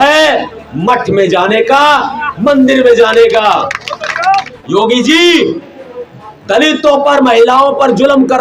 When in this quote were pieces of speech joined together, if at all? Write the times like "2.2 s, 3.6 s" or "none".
4.5 s

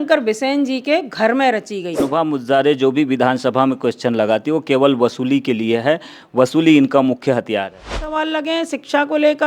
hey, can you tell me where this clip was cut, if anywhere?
2.1 s, 8.1 s

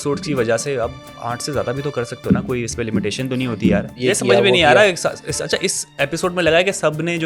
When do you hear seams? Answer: 4.0 s

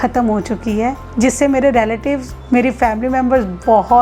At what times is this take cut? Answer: 1.0 s

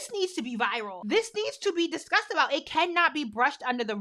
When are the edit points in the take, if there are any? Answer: 0.9 s

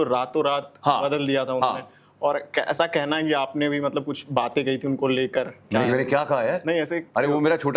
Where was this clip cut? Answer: none

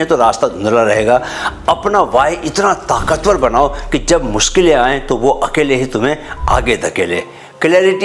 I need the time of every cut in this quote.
none

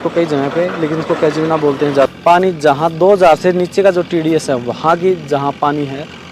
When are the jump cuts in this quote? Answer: 2.1 s

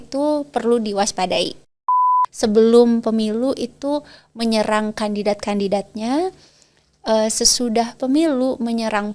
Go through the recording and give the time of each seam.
2.2 s

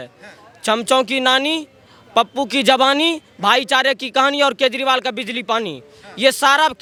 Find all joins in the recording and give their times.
none

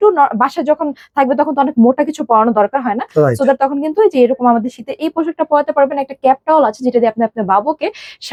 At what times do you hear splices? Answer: none

